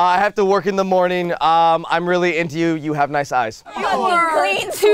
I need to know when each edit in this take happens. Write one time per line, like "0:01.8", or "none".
0:04.0